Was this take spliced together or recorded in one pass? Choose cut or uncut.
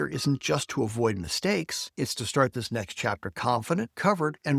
uncut